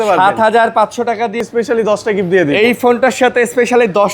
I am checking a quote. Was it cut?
yes; 1 cut; at 1.4 s

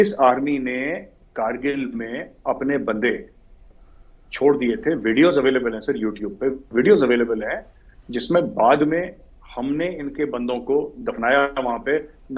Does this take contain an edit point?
no; 0 cuts

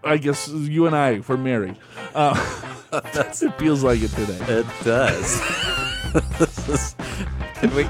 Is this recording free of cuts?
yes; 0 cuts

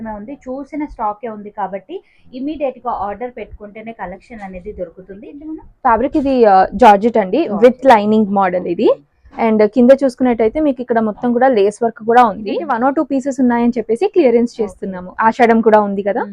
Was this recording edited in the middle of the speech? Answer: yes; 2 cuts; at 5.3 s, 12.7 s

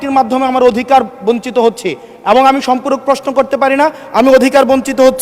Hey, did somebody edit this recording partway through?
no; 0 cuts

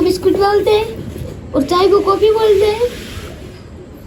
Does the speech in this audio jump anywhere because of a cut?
no; 0 cuts

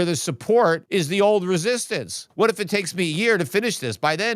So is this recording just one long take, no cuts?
no; 2 cuts; at 0.8 s, 2.2 s

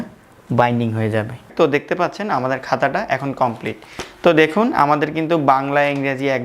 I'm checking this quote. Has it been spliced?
yes; 1 cut; at 1.5 s

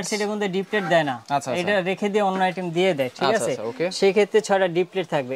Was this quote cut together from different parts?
no; 0 cuts

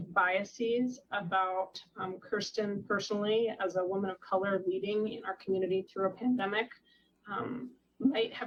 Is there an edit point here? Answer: no; 0 cuts

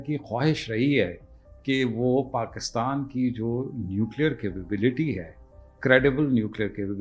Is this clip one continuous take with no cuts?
yes; 0 cuts

